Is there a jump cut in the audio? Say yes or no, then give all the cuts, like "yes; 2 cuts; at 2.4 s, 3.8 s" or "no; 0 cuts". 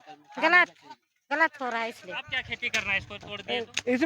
yes; 1 cut; at 2.5 s